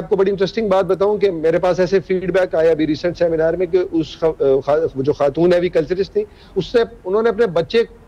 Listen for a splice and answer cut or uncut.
uncut